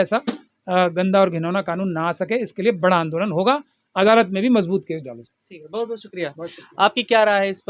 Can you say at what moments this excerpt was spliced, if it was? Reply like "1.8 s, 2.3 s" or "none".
none